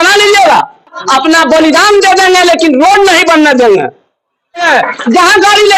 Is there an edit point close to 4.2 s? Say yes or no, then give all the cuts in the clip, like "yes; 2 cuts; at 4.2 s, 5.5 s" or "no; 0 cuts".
yes; 2 cuts; at 1.0 s, 4.2 s